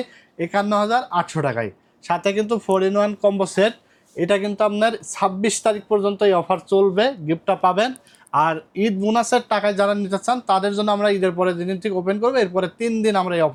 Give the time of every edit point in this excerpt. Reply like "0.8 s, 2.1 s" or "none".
none